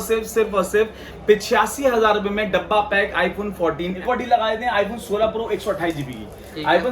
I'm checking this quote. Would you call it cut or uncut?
cut